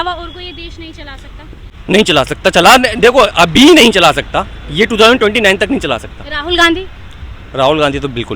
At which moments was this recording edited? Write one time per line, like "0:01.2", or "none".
0:01.7